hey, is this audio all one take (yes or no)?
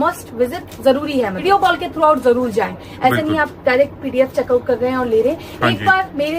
no